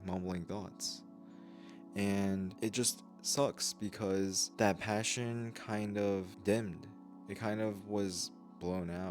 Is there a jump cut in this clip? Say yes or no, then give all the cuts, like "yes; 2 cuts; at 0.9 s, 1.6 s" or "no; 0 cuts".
yes; 3 cuts; at 2.5 s, 4.4 s, 6.3 s